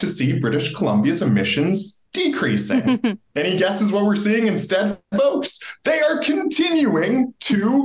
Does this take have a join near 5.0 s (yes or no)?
no